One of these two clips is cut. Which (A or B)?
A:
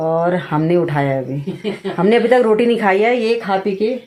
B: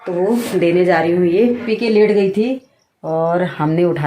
B